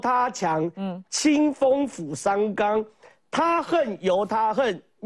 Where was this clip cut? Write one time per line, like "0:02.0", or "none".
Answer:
none